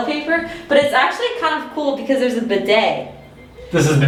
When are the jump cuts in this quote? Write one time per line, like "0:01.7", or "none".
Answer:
none